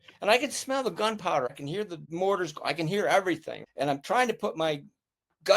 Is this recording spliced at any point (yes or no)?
yes